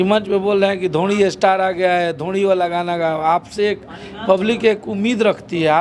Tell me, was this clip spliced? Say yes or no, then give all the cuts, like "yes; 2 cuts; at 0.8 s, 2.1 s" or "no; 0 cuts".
no; 0 cuts